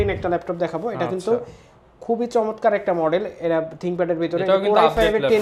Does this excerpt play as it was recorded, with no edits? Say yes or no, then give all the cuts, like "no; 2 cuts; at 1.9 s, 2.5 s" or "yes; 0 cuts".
yes; 0 cuts